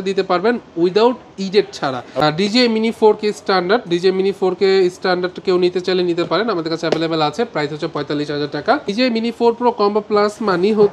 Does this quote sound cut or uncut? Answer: cut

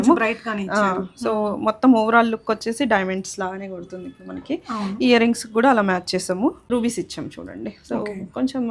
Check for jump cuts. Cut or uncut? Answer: cut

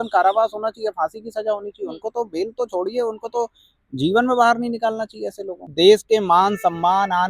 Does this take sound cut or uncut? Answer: cut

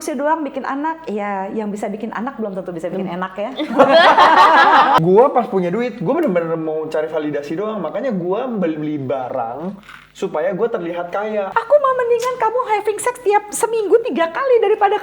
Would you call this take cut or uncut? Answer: cut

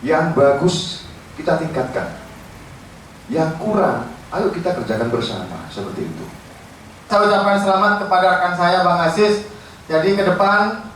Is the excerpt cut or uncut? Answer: cut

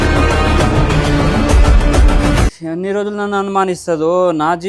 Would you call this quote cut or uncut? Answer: cut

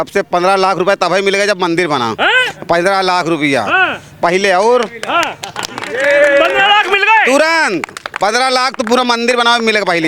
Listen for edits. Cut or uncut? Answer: uncut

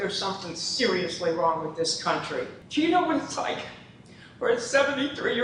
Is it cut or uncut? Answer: cut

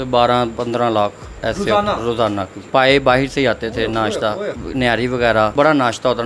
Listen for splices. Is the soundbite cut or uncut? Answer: cut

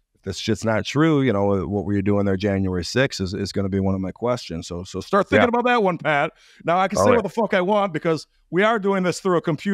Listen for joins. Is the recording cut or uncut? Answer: uncut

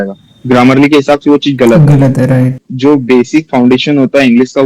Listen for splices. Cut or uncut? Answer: cut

